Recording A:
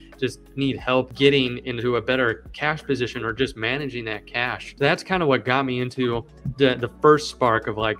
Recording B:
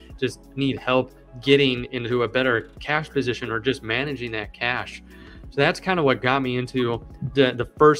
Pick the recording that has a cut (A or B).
A